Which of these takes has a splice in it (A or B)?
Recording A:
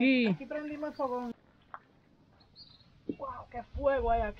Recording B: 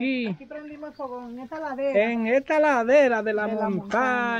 A